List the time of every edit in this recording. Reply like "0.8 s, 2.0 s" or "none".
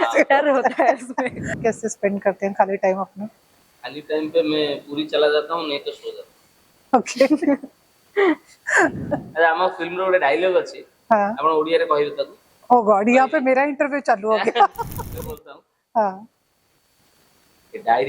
1.6 s, 9.1 s